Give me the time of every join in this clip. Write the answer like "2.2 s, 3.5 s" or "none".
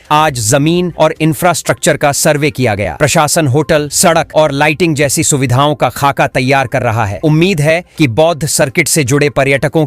none